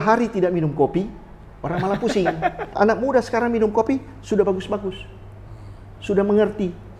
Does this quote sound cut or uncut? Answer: cut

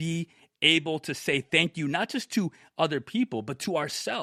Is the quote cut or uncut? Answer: uncut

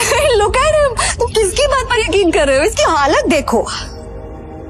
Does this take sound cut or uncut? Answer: uncut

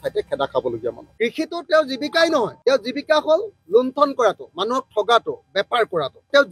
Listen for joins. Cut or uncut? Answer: cut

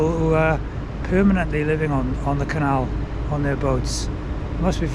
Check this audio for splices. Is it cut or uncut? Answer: uncut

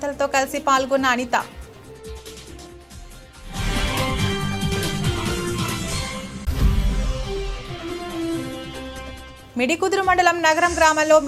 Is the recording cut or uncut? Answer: uncut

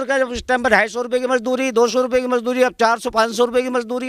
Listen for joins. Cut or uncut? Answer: uncut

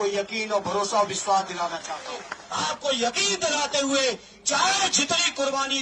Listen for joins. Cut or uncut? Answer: cut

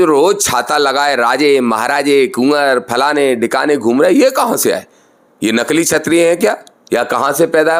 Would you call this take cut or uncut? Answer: uncut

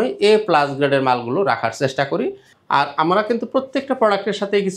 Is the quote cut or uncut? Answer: cut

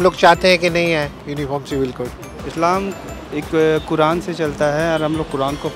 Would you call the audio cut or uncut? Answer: cut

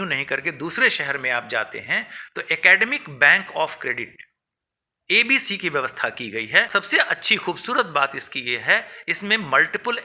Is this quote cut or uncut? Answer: cut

